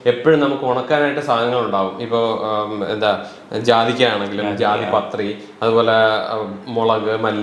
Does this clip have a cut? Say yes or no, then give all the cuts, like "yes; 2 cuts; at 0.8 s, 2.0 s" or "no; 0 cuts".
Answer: no; 0 cuts